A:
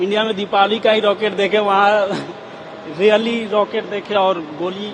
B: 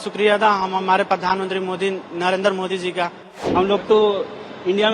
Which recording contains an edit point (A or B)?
B